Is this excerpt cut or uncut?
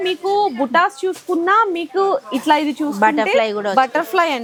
uncut